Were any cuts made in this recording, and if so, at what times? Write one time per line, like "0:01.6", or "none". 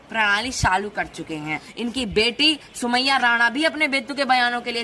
0:01.6

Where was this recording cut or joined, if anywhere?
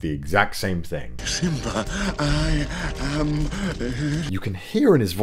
0:01.1
0:04.3

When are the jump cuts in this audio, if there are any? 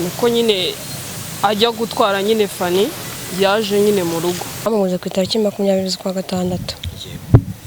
0:04.7

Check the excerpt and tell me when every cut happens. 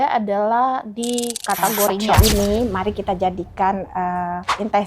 0:02.1

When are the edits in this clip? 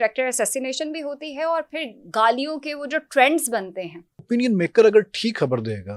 0:04.2

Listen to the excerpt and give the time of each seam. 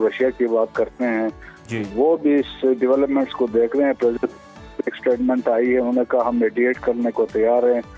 none

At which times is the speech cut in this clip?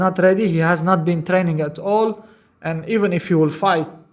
none

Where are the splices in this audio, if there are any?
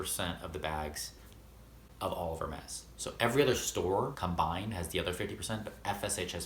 none

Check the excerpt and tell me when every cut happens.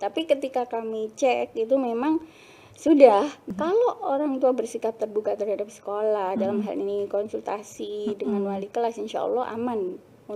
0:03.4

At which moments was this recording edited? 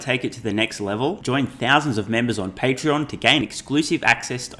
none

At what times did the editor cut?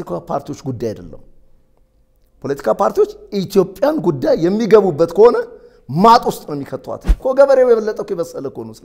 0:07.1

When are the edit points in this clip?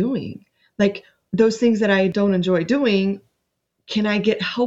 0:01.1
0:02.1

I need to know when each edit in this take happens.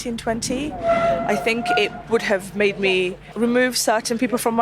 0:03.2

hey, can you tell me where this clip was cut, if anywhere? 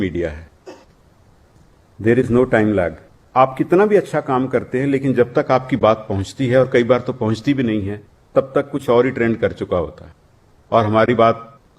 0:03.2

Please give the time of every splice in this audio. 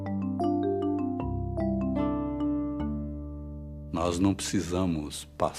none

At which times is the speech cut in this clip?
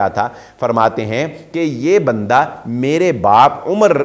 none

